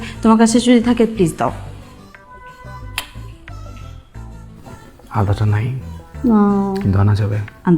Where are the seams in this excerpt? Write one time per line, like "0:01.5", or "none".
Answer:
none